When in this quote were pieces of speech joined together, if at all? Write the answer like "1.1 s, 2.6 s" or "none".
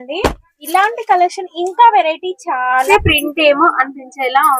2.9 s